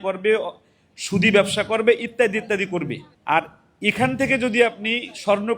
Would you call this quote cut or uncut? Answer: cut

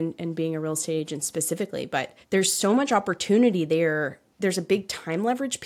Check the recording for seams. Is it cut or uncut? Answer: cut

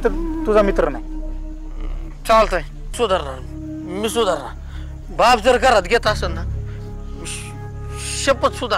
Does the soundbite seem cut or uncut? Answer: cut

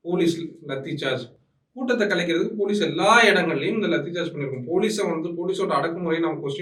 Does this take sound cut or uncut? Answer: uncut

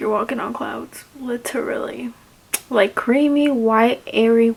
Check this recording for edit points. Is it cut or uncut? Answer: uncut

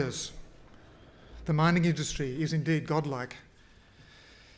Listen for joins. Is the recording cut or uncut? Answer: uncut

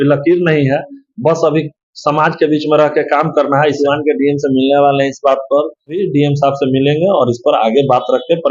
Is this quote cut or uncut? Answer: cut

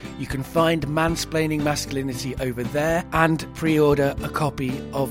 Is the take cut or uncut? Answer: cut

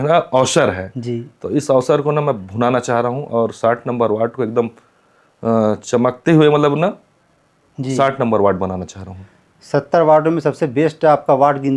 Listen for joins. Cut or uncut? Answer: uncut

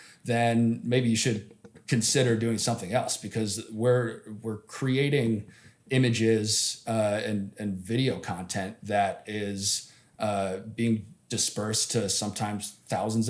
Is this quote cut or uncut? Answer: uncut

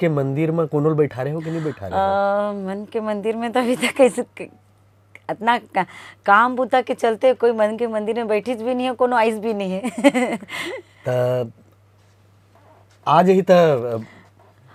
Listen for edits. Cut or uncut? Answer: uncut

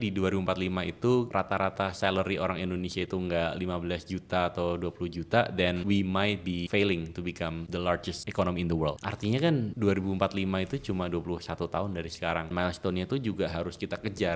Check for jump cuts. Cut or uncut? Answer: cut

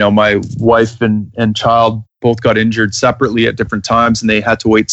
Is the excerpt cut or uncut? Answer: uncut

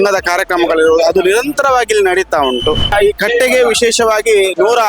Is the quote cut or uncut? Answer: cut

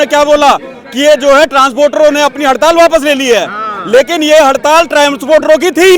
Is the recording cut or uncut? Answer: uncut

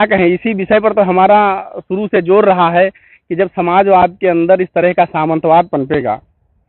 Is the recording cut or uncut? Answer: uncut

